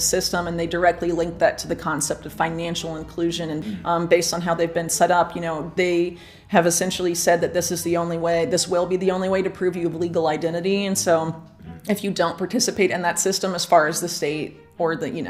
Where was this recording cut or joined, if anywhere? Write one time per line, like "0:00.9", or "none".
0:03.6

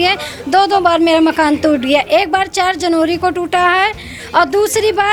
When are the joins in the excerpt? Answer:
none

